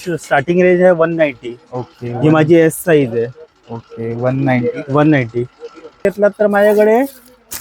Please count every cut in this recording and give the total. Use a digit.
1